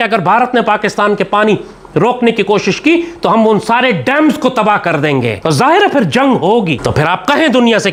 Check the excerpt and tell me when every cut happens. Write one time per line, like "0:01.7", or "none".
none